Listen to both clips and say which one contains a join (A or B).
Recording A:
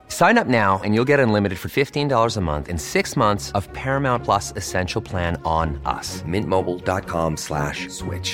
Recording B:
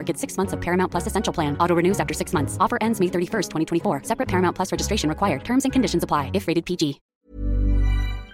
B